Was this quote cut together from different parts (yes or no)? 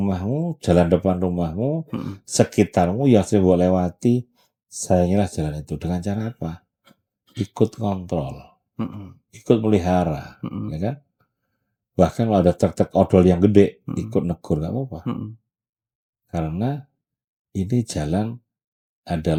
no